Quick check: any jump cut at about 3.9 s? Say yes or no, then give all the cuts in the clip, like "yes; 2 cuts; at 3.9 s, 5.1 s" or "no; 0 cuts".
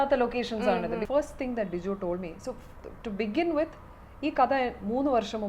no; 1 cut; at 1.0 s